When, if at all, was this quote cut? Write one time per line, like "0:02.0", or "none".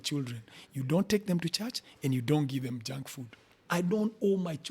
0:03.6